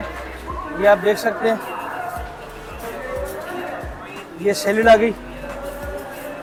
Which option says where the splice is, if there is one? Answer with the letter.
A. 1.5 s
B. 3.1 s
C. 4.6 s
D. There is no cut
D